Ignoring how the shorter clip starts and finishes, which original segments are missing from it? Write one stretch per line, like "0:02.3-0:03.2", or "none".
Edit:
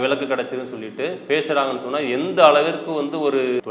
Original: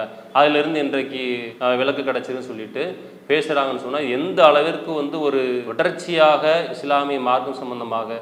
0:02.9-0:03.2